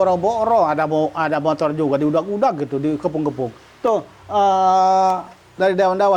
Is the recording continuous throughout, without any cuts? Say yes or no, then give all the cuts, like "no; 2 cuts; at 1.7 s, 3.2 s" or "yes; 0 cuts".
yes; 0 cuts